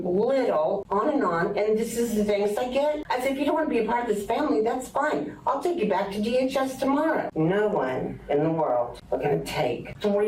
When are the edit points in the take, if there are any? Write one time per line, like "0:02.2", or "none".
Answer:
0:07.3